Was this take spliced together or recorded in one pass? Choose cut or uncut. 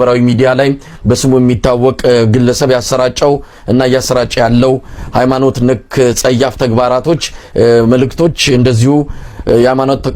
uncut